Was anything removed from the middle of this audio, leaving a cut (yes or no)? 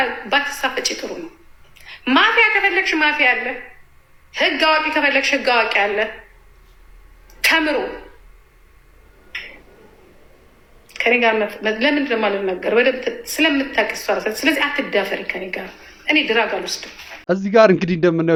no